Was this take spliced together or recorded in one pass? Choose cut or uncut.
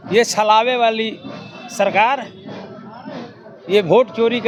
uncut